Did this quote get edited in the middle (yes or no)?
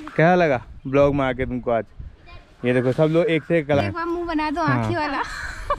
yes